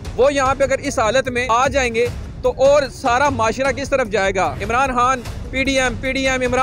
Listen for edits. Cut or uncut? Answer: cut